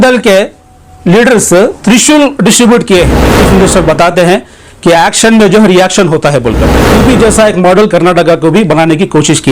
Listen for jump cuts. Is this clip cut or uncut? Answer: cut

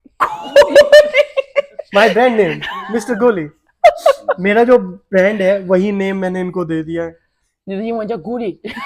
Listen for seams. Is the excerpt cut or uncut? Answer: uncut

